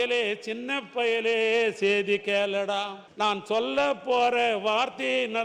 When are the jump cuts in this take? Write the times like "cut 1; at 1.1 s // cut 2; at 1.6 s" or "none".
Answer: cut 1; at 3.0 s

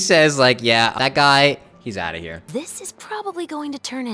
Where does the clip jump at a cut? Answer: cut 1; at 0.9 s // cut 2; at 2.4 s

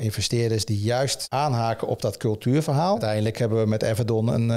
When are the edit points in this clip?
cut 1; at 1.2 s // cut 2; at 3.0 s

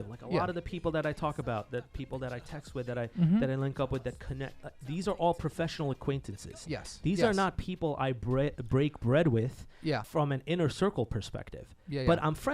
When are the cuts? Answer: cut 1; at 10.0 s

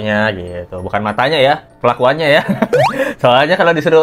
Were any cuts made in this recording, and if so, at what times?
none

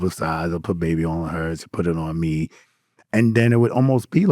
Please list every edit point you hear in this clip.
none

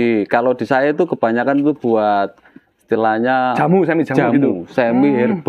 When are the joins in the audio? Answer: none

